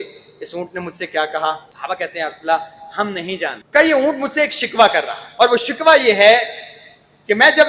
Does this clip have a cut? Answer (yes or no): yes